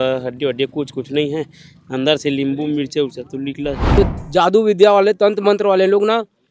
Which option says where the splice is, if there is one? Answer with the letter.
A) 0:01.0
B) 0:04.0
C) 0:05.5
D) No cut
B